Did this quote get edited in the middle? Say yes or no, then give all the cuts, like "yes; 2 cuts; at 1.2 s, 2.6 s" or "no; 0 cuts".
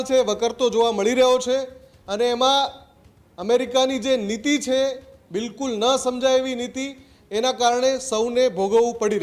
no; 0 cuts